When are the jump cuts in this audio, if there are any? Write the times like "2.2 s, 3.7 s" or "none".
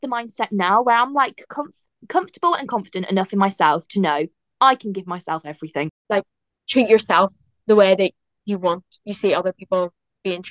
6.0 s